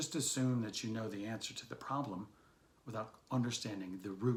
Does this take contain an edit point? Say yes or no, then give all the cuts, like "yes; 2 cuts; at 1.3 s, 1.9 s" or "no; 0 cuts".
no; 0 cuts